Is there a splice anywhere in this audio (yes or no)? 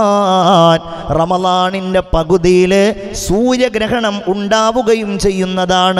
no